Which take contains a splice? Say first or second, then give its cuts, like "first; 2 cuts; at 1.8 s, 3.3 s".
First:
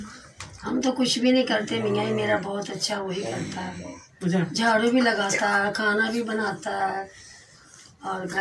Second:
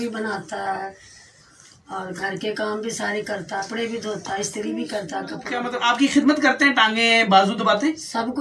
second; 2 cuts; at 3.7 s, 5.6 s